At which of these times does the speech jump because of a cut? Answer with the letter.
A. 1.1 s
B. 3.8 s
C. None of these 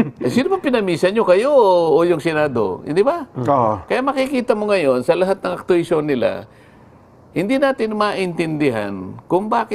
A